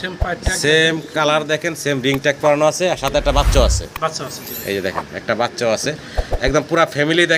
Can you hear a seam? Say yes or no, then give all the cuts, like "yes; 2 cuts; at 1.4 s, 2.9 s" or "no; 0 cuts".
no; 0 cuts